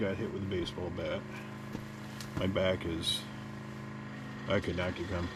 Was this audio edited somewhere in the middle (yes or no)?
no